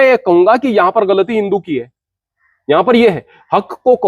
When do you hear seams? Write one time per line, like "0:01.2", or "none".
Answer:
none